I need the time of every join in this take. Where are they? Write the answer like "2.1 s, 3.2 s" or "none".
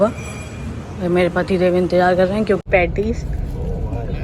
2.6 s